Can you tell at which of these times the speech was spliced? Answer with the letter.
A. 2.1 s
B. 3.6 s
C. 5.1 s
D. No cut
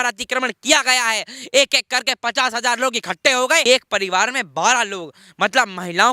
B